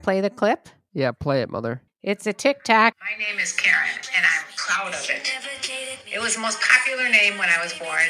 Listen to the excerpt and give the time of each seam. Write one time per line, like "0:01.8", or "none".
0:01.7
0:03.0